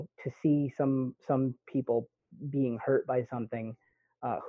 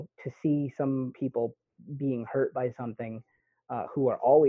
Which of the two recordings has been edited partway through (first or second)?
second